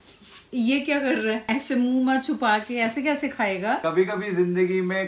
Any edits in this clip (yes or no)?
yes